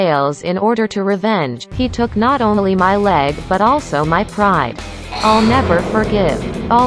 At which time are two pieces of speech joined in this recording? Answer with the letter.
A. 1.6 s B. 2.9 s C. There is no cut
A